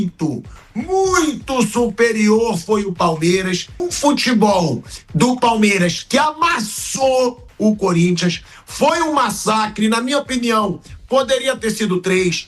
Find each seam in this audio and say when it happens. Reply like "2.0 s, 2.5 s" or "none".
3.8 s